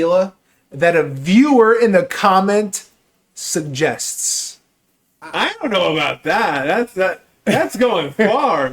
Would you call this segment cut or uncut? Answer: cut